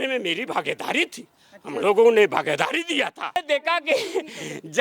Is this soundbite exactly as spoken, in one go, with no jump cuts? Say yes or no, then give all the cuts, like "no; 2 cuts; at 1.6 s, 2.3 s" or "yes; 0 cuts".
no; 1 cut; at 3.4 s